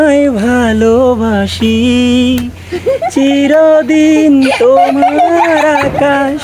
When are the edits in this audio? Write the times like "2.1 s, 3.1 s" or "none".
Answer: none